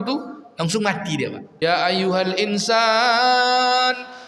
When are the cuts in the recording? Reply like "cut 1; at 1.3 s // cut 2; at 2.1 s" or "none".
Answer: cut 1; at 1.6 s